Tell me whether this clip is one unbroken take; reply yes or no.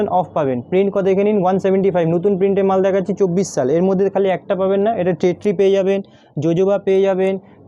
yes